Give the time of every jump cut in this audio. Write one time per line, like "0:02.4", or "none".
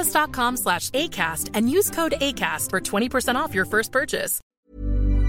0:04.4

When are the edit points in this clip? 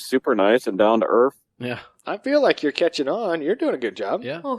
0:01.5

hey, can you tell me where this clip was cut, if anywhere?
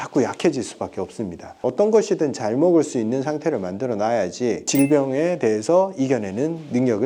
0:01.6
0:04.6

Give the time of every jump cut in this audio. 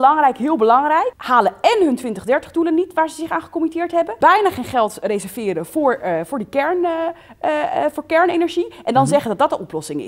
0:01.2
0:04.1

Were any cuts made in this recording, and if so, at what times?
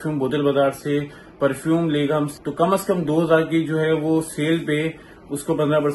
0:02.3

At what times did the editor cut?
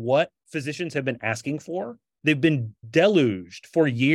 none

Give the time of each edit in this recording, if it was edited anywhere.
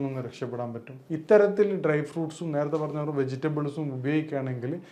0:00.9

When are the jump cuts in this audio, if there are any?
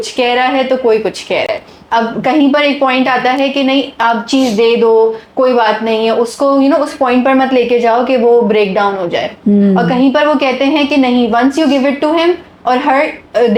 none

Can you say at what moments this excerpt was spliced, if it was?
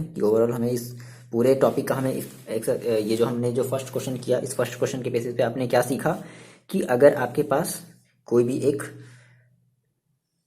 none

